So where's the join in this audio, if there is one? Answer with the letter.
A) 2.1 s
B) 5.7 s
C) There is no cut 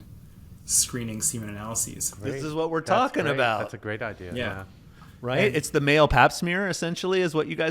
A